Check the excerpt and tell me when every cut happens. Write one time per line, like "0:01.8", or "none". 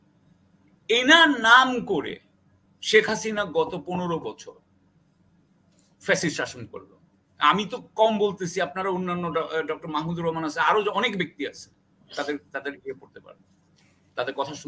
none